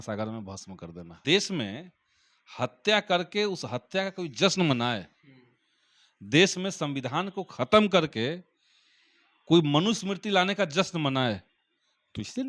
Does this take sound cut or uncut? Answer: cut